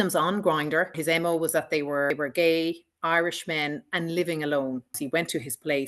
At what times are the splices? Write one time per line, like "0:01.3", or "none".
0:01.0
0:02.1
0:04.9